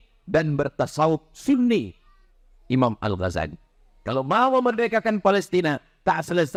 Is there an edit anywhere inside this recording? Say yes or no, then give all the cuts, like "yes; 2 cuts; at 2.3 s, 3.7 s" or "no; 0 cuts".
no; 0 cuts